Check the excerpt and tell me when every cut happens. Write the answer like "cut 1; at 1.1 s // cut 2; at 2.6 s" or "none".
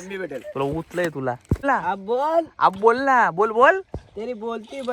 cut 1; at 1.6 s